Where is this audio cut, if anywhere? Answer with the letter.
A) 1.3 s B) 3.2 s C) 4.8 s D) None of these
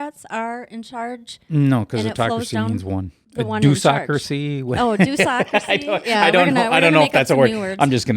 B